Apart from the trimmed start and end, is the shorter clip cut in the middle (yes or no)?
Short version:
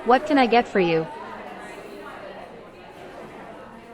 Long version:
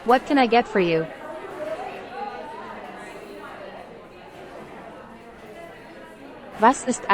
yes